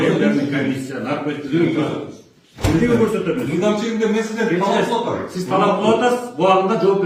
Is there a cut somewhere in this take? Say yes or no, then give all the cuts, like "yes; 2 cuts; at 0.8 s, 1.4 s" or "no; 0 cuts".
no; 0 cuts